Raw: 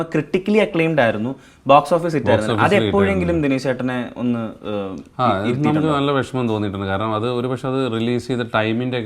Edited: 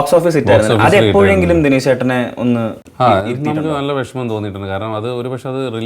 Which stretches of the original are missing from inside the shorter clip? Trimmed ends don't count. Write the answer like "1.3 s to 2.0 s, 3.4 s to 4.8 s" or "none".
4.6 s to 5.0 s